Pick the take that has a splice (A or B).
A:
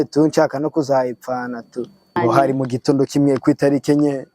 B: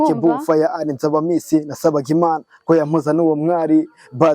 A